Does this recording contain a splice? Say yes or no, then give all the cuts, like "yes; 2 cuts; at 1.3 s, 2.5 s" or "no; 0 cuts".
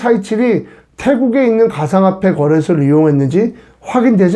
no; 0 cuts